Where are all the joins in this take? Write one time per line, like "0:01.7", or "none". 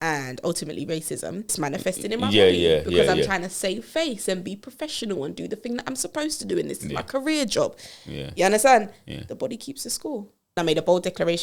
0:01.5
0:10.6